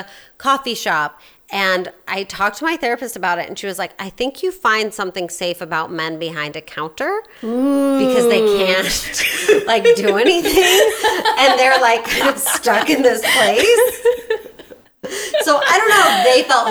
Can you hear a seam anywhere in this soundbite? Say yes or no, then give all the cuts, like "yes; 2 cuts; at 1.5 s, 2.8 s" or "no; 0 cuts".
no; 0 cuts